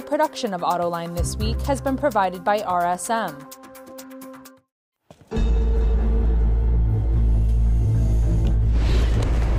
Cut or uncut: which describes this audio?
cut